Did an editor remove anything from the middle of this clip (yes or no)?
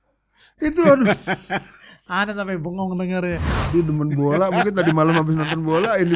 yes